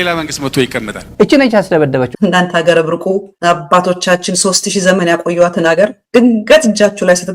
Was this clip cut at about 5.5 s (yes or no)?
no